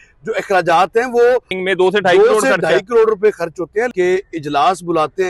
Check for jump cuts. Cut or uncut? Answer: cut